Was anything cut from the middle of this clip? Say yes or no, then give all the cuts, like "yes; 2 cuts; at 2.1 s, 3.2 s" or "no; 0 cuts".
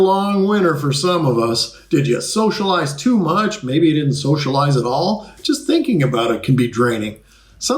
no; 0 cuts